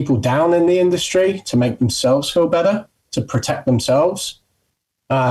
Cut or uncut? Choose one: uncut